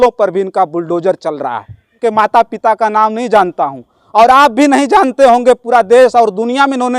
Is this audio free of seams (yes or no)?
no